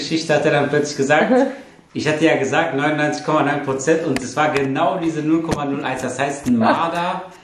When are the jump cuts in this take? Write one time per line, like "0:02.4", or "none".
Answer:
none